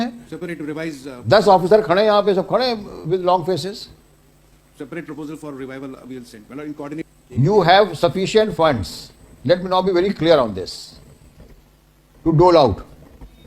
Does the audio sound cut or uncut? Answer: cut